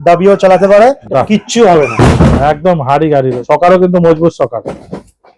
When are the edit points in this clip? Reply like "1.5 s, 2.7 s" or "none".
1.0 s, 3.4 s